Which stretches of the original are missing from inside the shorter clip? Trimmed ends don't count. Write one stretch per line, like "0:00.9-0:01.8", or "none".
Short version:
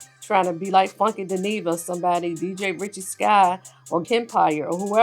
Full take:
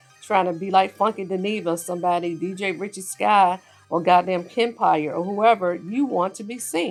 0:04.0-0:04.5